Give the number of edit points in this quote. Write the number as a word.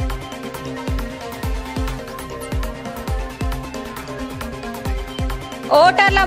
zero